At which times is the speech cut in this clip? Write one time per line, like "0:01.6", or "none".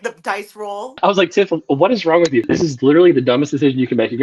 0:00.9
0:02.5